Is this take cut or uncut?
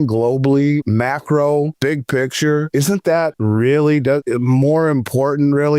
cut